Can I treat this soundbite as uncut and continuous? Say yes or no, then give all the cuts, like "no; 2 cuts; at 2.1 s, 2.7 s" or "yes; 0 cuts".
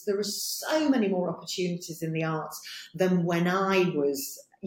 yes; 0 cuts